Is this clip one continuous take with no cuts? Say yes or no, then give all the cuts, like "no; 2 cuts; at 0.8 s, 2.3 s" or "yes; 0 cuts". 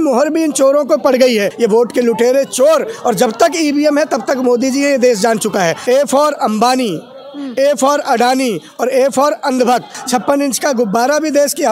no; 3 cuts; at 1.5 s, 5.8 s, 10.0 s